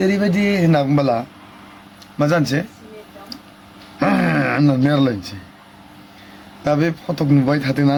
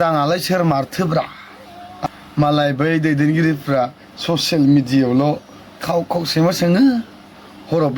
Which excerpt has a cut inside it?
second; 1 cut; at 2.1 s

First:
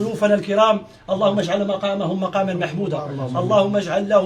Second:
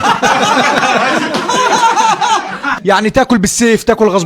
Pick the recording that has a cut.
second; 1 cut; at 2.8 s

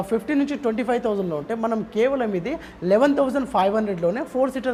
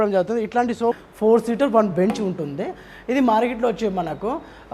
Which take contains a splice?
second; 1 cut; at 1.0 s

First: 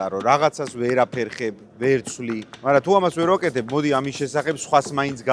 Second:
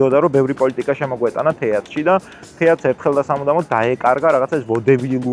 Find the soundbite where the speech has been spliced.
first; 1 cut; at 2.5 s

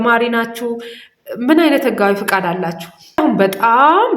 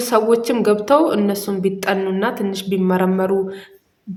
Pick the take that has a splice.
first; 1 cut; at 3.2 s

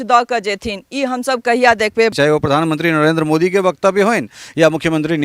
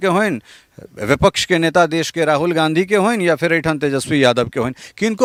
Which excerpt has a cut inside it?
first; 1 cut; at 2.1 s

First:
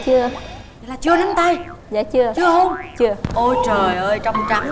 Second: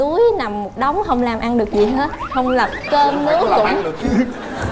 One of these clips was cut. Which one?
second; 1 cut; at 2.8 s

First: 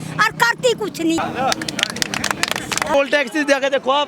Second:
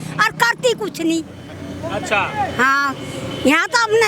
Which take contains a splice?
first; 2 cuts; at 1.2 s, 2.9 s

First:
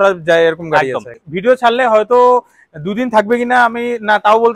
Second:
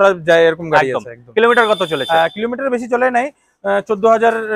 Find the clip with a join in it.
first; 1 cut; at 1.2 s

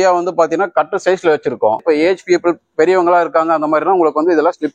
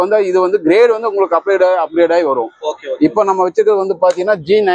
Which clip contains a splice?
first; 1 cut; at 1.8 s

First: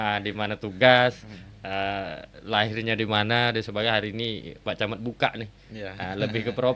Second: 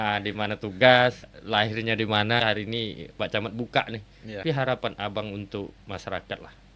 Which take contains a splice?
second; 3 cuts; at 1.3 s, 2.4 s, 4.4 s

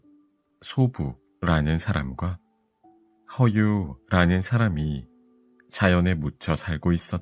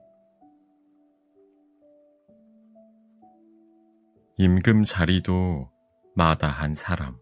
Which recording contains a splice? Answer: second; 1 cut; at 4.2 s

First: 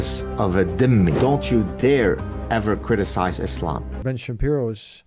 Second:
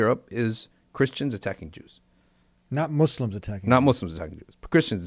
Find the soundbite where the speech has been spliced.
first; 1 cut; at 4.0 s

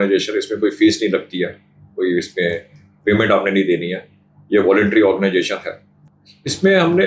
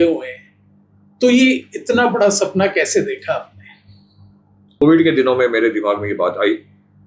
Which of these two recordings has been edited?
second; 1 cut; at 4.8 s

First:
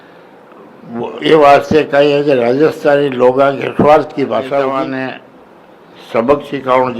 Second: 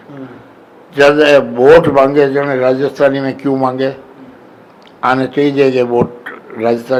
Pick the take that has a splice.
first; 1 cut; at 4.7 s

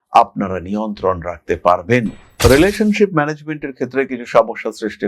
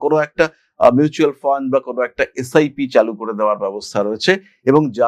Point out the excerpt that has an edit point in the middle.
first; 1 cut; at 2.2 s

